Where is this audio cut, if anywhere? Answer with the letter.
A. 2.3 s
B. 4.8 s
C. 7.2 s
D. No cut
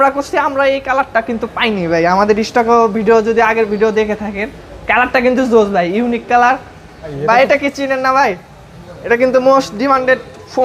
C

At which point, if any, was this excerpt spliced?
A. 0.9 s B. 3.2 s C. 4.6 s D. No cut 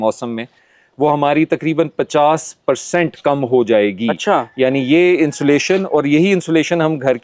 D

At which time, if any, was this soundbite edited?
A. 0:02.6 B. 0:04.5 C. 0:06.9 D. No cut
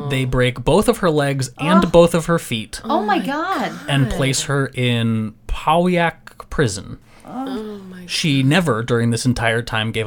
C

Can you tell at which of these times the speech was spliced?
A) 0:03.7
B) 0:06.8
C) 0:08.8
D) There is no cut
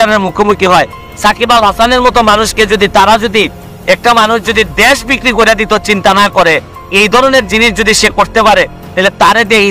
A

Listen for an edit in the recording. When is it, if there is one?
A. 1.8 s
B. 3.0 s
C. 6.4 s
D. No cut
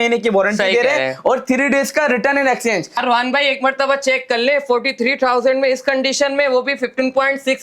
B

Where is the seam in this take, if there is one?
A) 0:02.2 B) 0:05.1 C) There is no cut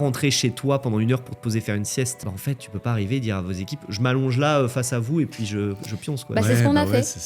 A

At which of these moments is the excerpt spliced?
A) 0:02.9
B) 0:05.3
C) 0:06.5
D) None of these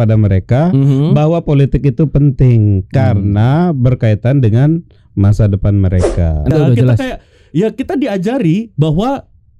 C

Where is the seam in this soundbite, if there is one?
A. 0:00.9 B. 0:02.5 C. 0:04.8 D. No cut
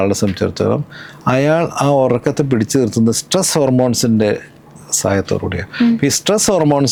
D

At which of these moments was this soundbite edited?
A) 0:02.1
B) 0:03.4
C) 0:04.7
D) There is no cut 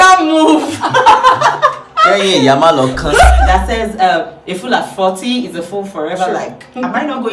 B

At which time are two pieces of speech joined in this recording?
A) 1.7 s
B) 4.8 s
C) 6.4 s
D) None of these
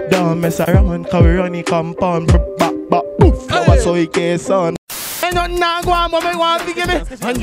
B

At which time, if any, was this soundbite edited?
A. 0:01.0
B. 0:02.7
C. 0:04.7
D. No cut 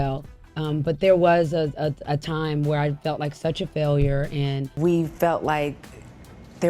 C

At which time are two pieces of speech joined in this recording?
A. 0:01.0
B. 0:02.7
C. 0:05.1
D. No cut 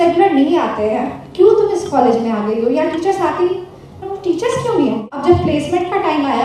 C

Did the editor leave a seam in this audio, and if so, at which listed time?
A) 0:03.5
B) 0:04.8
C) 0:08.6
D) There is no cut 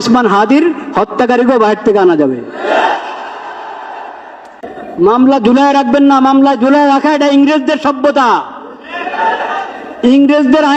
B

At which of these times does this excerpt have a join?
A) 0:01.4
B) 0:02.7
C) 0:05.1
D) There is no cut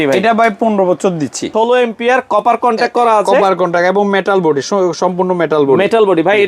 A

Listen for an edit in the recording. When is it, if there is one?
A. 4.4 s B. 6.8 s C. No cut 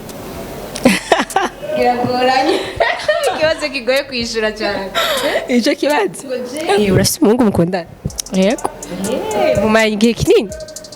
B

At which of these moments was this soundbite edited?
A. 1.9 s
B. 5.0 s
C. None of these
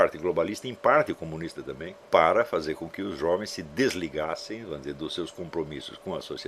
A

